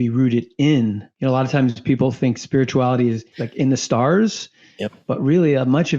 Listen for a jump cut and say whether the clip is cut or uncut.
cut